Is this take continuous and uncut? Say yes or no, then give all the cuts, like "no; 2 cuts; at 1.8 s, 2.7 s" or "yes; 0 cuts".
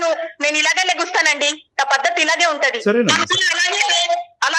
yes; 0 cuts